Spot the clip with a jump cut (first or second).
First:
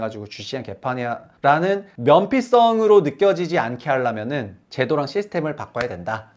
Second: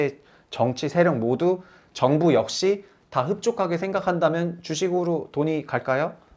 first